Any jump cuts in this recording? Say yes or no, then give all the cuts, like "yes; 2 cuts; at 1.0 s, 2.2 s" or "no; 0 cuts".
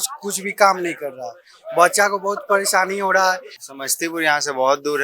yes; 1 cut; at 3.5 s